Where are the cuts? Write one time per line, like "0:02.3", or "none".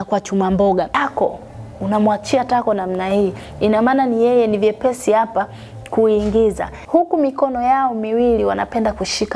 0:00.9
0:06.7